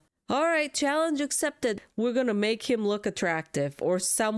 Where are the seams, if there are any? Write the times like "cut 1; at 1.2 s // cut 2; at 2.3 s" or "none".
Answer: cut 1; at 1.8 s